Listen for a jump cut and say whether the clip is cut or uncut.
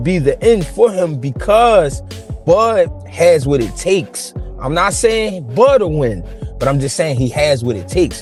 uncut